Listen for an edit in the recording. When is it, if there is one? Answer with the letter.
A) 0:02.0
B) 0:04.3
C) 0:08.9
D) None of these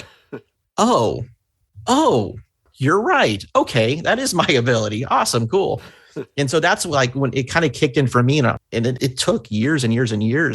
C